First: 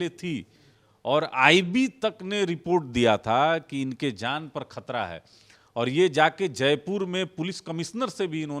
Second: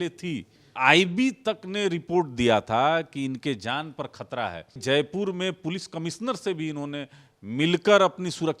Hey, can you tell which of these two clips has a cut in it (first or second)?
second